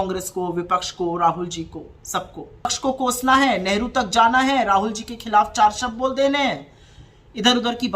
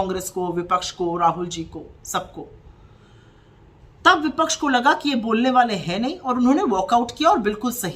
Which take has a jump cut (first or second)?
first